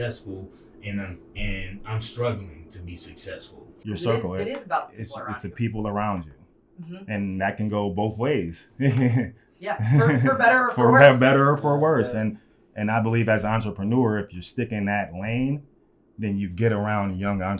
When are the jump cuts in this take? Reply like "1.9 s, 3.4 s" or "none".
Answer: 3.7 s